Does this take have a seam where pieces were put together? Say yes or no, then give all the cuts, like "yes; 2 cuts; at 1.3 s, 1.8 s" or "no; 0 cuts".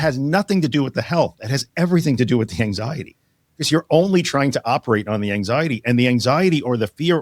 no; 0 cuts